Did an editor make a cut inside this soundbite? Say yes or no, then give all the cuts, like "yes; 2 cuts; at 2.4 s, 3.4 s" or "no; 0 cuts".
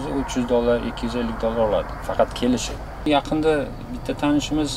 yes; 1 cut; at 3.1 s